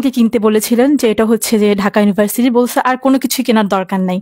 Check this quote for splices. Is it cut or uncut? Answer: uncut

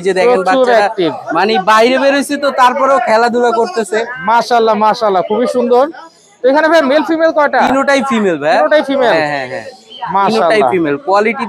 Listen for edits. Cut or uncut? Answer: uncut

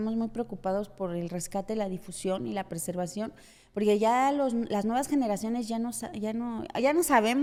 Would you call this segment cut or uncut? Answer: uncut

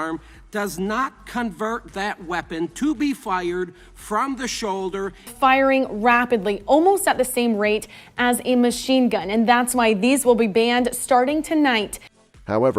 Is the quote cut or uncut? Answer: uncut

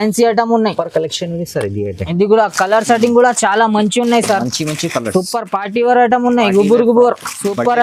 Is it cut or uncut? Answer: uncut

